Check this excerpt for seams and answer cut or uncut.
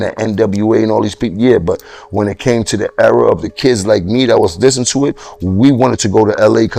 uncut